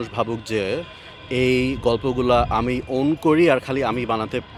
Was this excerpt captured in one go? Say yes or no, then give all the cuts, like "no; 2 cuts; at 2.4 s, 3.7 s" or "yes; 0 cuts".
yes; 0 cuts